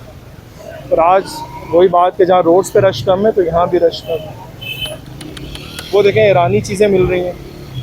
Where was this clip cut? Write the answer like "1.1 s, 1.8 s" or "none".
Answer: none